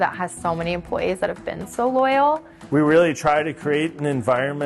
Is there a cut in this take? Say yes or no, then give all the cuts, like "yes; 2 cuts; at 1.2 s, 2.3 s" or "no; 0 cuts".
yes; 1 cut; at 2.5 s